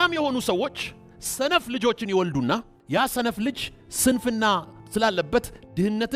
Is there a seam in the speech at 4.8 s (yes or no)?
yes